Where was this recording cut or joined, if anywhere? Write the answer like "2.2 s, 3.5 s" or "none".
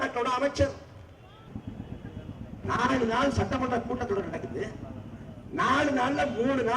1.5 s